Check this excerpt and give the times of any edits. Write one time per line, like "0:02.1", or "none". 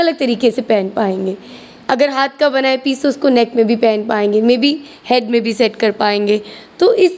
none